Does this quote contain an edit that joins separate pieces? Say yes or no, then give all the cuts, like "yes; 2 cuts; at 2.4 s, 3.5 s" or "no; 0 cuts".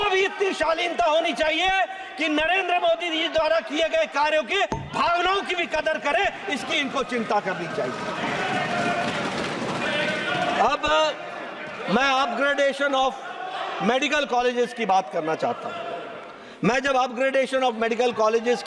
no; 0 cuts